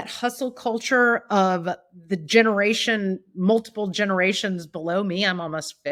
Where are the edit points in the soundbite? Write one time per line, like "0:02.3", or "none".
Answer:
none